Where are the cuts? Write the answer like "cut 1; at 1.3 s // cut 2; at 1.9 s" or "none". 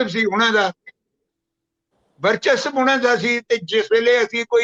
none